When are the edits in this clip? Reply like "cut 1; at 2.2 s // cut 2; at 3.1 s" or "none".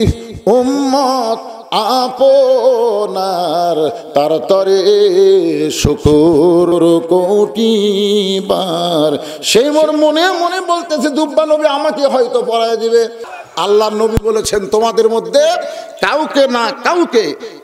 cut 1; at 6.7 s // cut 2; at 13.2 s